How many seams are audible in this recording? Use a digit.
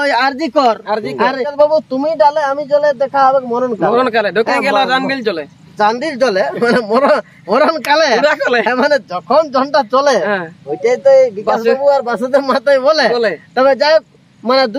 1